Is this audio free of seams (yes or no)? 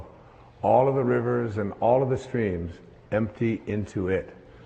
no